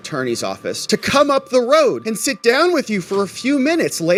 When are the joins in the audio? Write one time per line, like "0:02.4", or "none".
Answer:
none